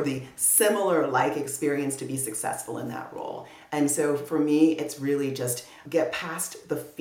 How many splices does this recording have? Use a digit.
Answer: 0